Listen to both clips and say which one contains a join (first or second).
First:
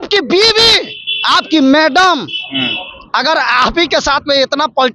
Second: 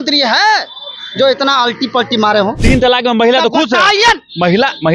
second